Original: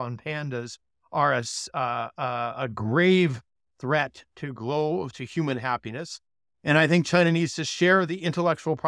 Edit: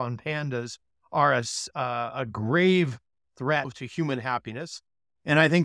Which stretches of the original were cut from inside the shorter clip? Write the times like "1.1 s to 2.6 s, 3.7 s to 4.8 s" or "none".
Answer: 1.6 s to 2.1 s, 4.2 s to 5.2 s